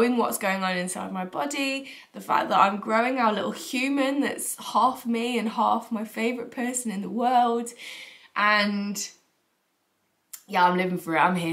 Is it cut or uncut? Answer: uncut